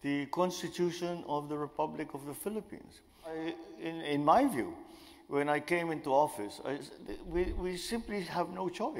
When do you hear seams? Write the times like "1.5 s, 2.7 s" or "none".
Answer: 3.4 s

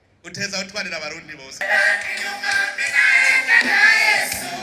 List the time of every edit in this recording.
1.6 s

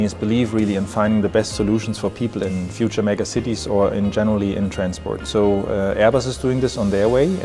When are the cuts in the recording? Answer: 2.5 s

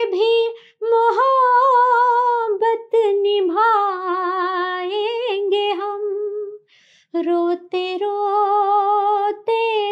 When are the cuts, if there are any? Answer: none

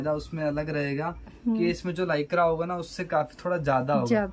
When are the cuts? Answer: none

